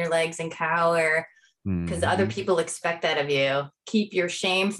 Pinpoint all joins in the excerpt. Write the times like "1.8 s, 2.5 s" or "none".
3.8 s